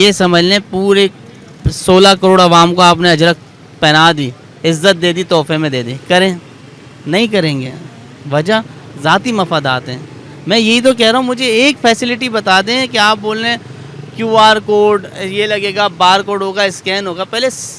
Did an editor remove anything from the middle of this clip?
no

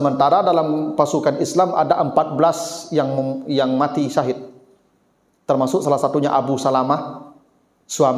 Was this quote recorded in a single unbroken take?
yes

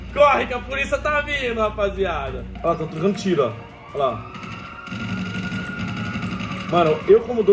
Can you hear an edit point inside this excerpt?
yes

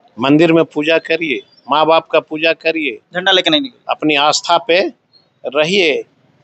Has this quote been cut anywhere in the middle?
no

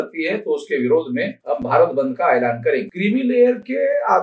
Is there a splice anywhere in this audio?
yes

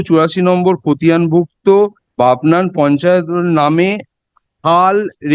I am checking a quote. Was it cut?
yes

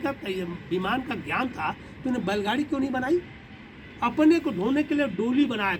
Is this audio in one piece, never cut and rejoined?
yes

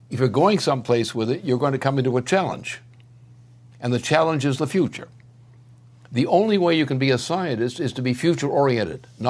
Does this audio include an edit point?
yes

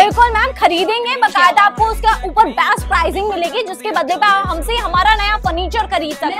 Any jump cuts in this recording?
no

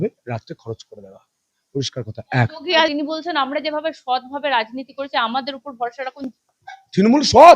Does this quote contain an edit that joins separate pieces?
yes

